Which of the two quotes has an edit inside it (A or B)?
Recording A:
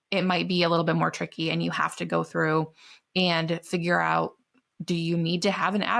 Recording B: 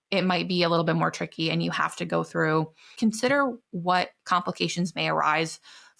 B